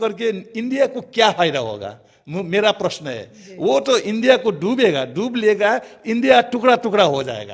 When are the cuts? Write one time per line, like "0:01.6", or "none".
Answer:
none